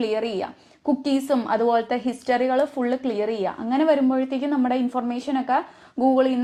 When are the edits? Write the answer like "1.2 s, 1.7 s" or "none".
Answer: none